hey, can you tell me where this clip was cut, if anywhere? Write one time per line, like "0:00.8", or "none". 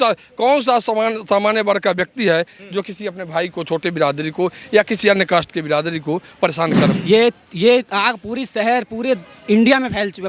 0:06.9